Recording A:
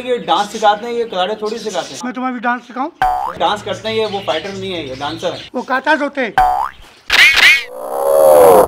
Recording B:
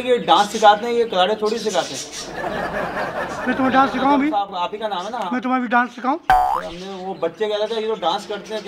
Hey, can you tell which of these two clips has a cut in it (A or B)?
A